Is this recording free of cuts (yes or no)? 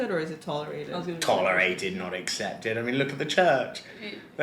yes